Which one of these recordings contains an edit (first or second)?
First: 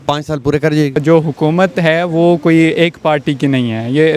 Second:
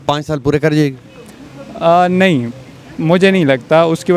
first